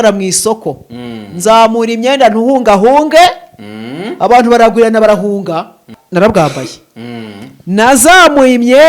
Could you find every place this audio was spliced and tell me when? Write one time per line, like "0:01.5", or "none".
0:06.0